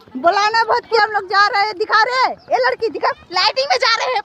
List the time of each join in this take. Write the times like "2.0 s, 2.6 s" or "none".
1.0 s